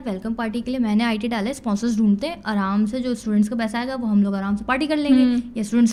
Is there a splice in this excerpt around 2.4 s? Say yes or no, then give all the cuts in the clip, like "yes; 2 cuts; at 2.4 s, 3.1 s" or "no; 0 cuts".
no; 0 cuts